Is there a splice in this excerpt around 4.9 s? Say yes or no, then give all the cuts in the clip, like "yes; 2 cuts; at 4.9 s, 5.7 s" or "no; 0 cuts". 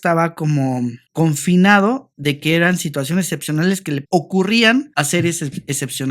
yes; 1 cut; at 4.9 s